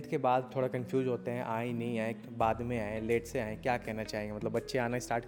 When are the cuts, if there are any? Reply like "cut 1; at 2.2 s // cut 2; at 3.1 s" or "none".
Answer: none